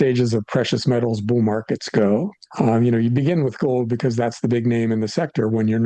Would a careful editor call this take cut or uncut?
uncut